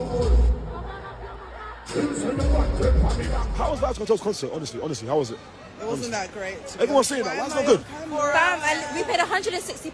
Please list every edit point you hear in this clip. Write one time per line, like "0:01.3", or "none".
0:03.5